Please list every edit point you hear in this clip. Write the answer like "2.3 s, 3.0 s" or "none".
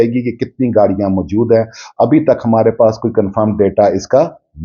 none